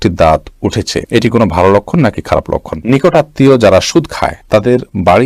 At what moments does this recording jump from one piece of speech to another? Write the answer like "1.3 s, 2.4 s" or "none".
2.8 s